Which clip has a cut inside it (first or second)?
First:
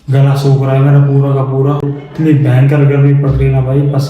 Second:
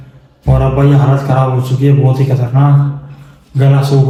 first